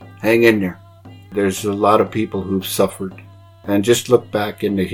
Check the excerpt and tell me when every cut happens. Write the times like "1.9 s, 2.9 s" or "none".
1.3 s